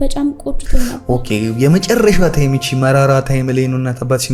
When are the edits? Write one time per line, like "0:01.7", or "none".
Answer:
none